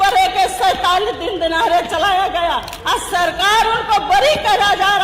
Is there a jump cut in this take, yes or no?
yes